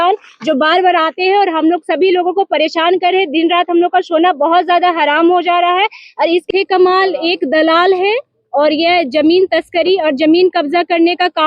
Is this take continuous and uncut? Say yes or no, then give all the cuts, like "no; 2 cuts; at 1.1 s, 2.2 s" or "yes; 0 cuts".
no; 1 cut; at 6.5 s